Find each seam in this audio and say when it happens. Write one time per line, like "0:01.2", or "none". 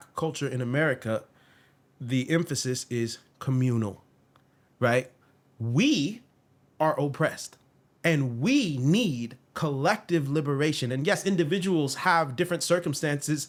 none

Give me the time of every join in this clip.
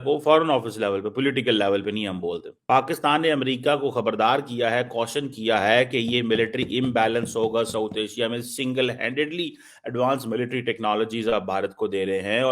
0:02.5

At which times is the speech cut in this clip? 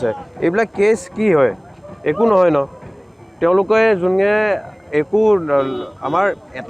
none

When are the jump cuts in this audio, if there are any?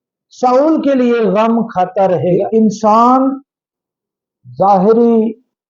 0:02.6

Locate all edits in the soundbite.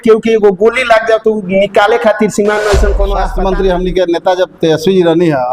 0:03.2

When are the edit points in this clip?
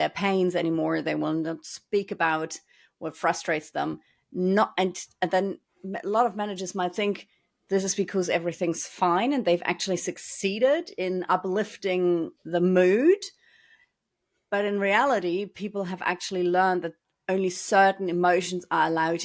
none

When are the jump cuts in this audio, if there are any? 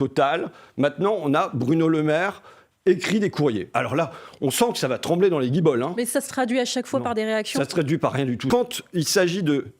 0:03.7
0:08.4

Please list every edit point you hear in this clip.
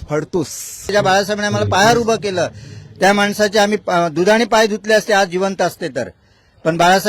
0:00.9

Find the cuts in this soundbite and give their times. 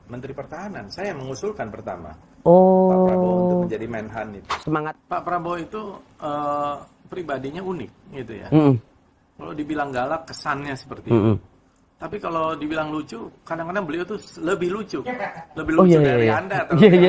0:04.7

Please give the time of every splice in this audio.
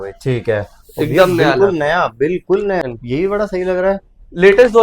0:02.8

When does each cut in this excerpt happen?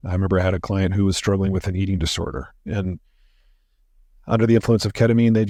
none

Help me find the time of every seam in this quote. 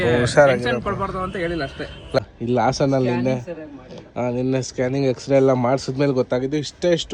0:02.2

